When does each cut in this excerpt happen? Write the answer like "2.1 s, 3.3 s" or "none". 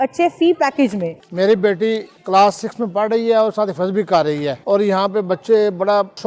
1.1 s, 2.1 s, 4.6 s